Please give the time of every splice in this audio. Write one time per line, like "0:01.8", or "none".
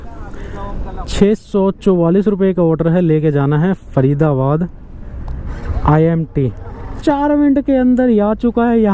0:06.9

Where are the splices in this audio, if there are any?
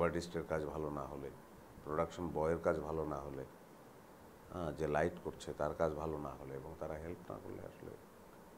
none

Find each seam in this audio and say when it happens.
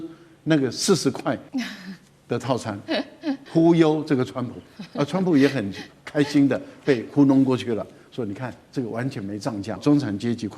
0:01.4
0:03.4
0:09.8

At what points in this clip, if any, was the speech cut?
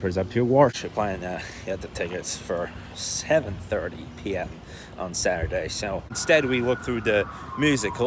0:00.8
0:06.2

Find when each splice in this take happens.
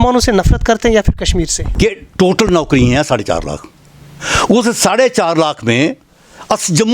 0:01.6

